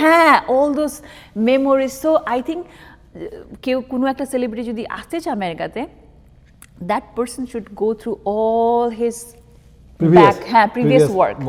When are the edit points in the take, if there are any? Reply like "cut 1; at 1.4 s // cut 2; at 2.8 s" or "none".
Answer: none

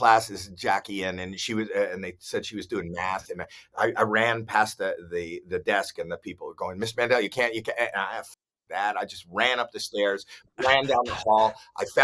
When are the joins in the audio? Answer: none

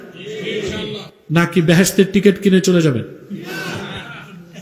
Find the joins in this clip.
cut 1; at 1.0 s

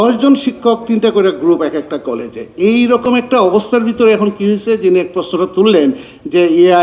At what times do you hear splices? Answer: none

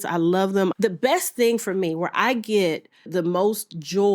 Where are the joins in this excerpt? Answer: cut 1; at 0.7 s // cut 2; at 3.1 s

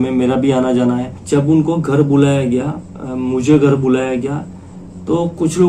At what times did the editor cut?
cut 1; at 1.1 s

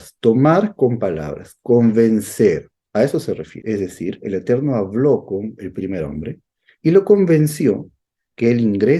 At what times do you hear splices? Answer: cut 1; at 3.5 s

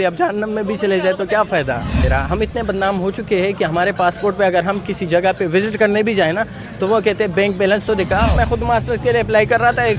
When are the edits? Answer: cut 1; at 2.0 s // cut 2; at 8.3 s

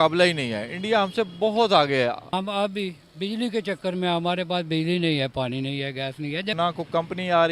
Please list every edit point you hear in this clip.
cut 1; at 2.2 s // cut 2; at 6.6 s

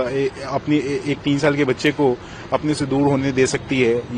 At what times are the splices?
none

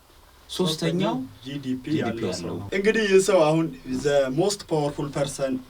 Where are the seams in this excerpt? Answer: cut 1; at 2.6 s

